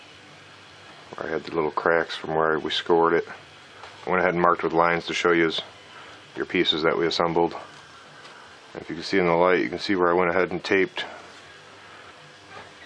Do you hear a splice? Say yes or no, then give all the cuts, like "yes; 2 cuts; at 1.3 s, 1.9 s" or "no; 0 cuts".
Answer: yes; 1 cut; at 11.0 s